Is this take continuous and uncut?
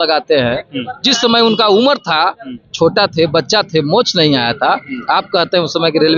yes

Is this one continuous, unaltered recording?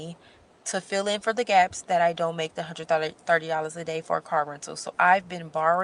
yes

